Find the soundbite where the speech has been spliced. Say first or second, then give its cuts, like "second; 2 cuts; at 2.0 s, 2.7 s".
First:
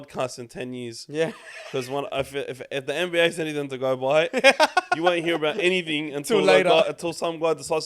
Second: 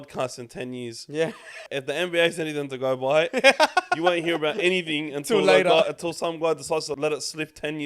second; 2 cuts; at 1.6 s, 6.9 s